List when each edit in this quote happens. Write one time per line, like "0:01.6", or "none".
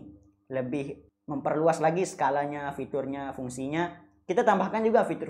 0:01.0